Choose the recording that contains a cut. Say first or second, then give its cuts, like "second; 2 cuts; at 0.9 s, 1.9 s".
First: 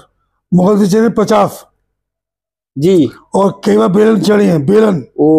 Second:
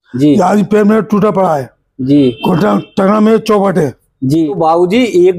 second; 1 cut; at 4.5 s